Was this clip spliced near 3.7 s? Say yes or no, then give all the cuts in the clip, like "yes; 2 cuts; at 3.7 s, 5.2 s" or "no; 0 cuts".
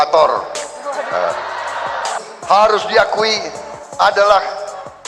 no; 1 cut; at 2.2 s